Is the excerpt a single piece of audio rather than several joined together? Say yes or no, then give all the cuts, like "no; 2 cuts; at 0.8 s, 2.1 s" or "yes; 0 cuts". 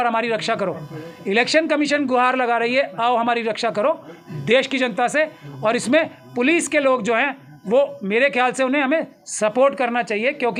yes; 0 cuts